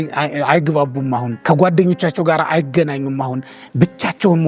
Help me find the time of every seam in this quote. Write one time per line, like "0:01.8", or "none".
0:01.3